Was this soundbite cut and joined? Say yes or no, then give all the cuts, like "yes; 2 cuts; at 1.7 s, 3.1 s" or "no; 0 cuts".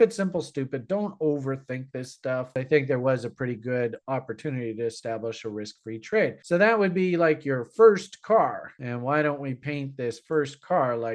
yes; 1 cut; at 2.5 s